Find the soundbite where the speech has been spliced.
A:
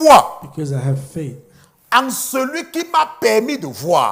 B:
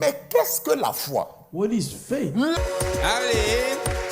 B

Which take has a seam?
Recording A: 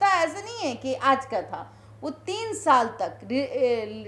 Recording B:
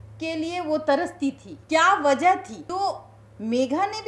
B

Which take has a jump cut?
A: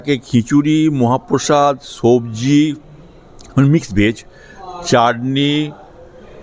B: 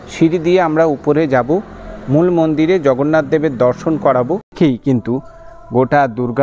B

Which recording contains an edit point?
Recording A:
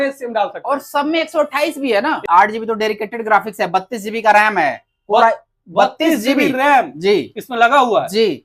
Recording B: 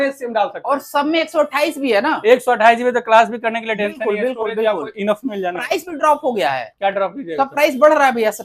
A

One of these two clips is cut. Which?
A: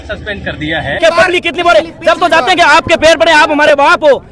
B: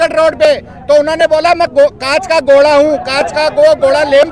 A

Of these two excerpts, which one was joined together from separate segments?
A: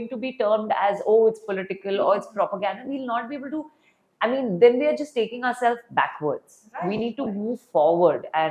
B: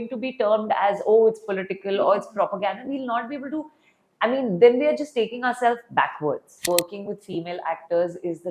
B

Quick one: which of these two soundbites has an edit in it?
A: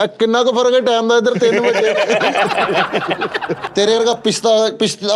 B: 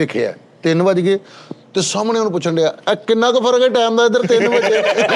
A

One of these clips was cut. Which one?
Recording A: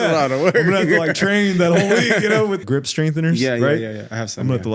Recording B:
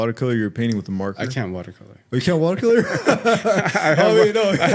A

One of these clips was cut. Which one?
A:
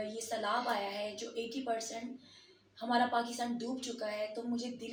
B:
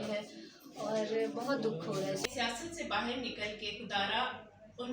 B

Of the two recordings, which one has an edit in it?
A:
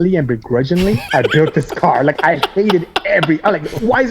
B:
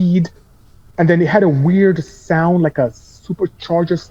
A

